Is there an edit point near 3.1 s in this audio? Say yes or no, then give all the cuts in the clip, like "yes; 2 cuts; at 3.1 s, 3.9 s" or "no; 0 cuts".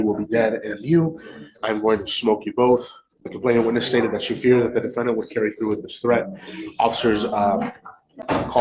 no; 0 cuts